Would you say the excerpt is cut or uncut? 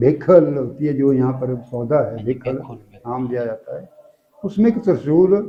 uncut